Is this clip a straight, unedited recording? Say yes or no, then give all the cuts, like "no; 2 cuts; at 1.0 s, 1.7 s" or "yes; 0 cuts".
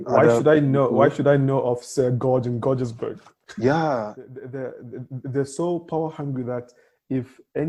no; 1 cut; at 4.1 s